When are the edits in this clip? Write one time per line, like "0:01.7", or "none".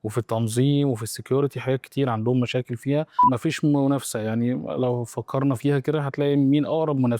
0:03.2